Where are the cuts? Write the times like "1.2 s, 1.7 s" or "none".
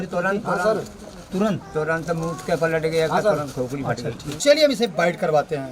4.4 s